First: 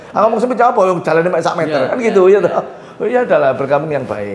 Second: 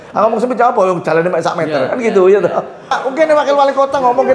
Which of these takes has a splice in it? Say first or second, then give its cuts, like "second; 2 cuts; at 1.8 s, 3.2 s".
second; 1 cut; at 3.0 s